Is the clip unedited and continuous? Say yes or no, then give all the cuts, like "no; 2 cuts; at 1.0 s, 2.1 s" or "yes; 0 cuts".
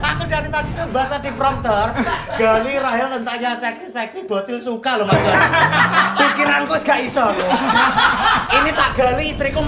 yes; 0 cuts